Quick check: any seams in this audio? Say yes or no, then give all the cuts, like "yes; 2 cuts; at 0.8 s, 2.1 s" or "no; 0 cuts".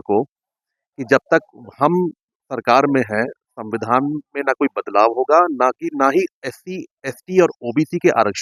no; 0 cuts